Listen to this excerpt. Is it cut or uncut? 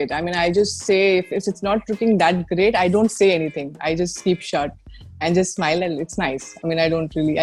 uncut